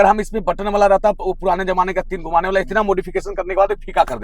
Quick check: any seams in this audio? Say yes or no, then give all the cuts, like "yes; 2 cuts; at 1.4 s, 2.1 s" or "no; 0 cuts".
no; 0 cuts